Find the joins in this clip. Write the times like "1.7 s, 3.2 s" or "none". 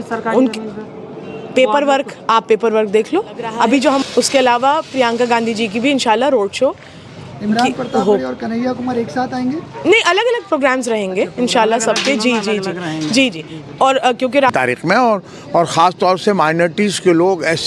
4.0 s, 14.5 s